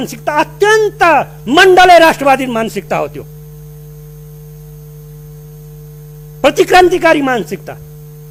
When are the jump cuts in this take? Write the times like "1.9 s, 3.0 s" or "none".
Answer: none